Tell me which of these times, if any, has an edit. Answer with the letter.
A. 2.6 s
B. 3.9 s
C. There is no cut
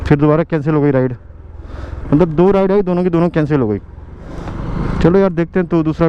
C